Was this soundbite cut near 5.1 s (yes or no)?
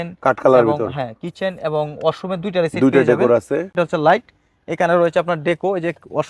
no